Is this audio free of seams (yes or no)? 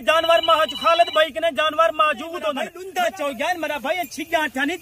no